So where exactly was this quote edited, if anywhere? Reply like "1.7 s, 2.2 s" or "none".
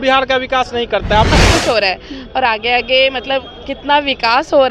1.3 s